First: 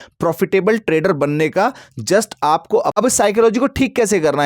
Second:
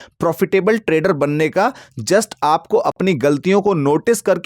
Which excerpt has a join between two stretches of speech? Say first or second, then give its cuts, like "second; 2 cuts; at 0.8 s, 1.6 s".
first; 1 cut; at 2.9 s